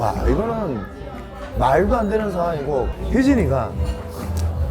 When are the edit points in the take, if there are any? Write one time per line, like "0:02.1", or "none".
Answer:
0:02.9